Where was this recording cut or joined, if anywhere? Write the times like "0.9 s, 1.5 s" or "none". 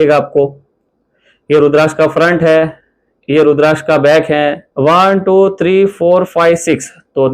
4.7 s